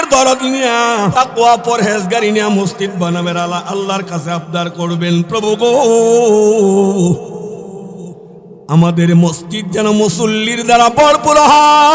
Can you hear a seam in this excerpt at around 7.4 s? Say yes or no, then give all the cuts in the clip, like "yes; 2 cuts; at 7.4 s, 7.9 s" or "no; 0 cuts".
no; 1 cut; at 1.1 s